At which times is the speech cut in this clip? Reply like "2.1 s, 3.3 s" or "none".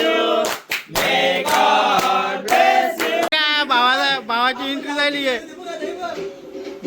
3.3 s